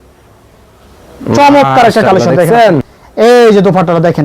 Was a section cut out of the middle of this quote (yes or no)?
yes